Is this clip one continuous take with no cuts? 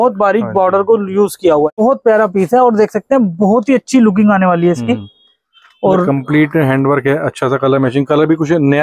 no; 1 cut; at 1.8 s

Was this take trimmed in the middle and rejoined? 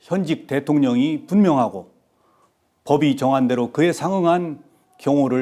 no; 0 cuts

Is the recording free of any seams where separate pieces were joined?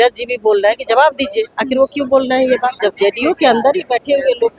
no; 1 cut; at 2.8 s

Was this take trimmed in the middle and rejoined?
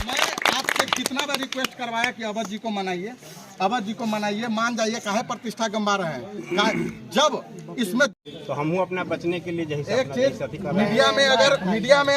yes; 1 cut; at 8.1 s

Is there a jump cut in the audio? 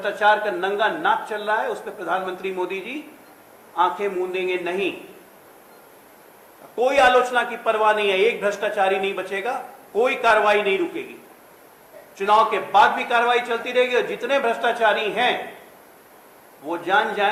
no; 0 cuts

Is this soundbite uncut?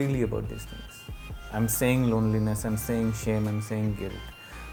yes; 0 cuts

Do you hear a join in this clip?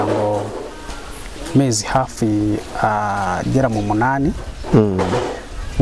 no; 0 cuts

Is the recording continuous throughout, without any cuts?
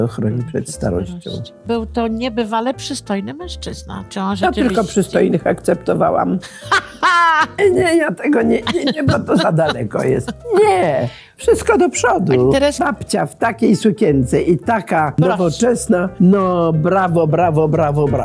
no; 5 cuts; at 1.6 s, 7.6 s, 12.7 s, 15.2 s, 16.1 s

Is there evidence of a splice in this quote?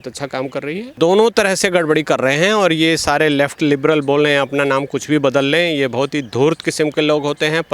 yes; 1 cut; at 0.9 s

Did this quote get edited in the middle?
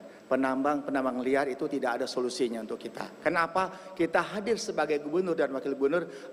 no; 0 cuts

